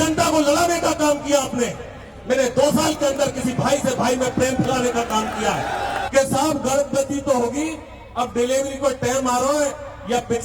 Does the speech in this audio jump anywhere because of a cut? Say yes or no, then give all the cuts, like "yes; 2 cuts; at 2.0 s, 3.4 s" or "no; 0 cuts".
yes; 1 cut; at 6.0 s